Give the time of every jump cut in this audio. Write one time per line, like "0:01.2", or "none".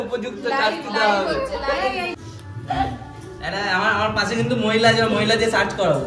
0:02.2